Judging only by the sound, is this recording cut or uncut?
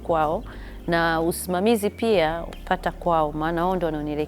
cut